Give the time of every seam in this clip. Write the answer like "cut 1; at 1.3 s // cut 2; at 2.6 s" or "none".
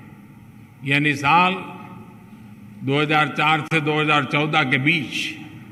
none